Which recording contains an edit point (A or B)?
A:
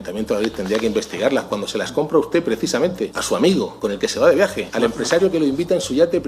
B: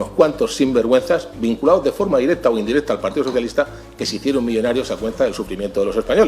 A